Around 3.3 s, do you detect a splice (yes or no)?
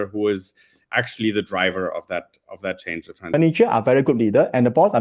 yes